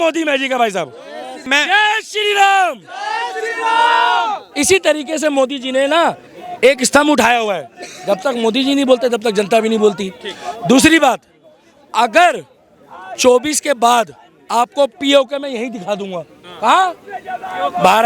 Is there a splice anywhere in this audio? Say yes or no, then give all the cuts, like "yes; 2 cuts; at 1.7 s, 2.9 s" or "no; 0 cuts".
yes; 1 cut; at 1.5 s